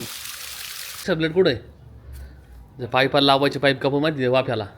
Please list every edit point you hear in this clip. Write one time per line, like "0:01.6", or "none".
0:01.0